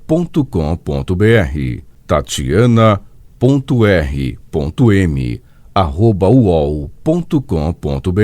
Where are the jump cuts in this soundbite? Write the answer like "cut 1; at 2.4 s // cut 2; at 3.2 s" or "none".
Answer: cut 1; at 1.5 s